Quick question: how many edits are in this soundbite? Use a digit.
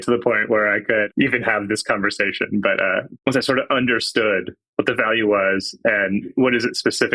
4